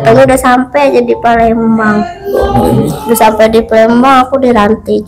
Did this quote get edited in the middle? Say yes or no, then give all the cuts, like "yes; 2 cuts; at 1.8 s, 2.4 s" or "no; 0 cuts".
no; 0 cuts